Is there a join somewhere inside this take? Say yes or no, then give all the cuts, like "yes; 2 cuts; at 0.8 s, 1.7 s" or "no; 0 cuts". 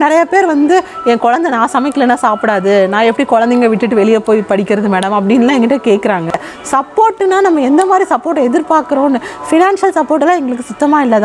yes; 1 cut; at 6.3 s